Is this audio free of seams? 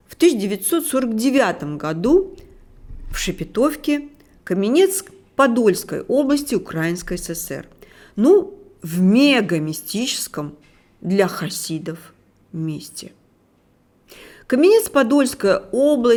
yes; 0 cuts

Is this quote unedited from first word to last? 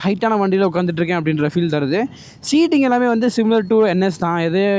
yes; 0 cuts

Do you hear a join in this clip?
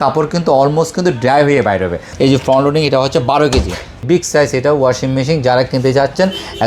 yes; 2 cuts; at 2.1 s, 4.0 s

